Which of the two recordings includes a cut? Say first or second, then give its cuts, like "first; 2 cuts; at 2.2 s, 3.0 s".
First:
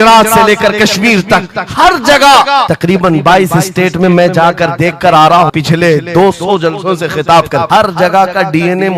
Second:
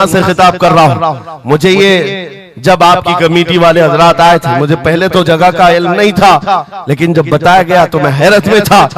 first; 3 cuts; at 2.7 s, 5.5 s, 7.7 s